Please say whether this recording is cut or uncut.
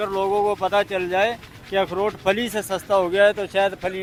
uncut